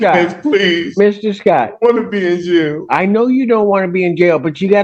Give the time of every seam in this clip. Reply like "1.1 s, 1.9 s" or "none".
none